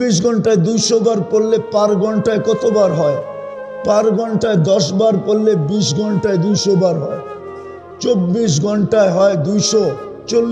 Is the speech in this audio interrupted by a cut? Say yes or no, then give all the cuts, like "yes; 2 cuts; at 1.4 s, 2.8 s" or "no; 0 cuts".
no; 0 cuts